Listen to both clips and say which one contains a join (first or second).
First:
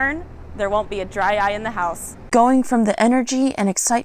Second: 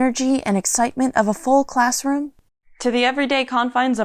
first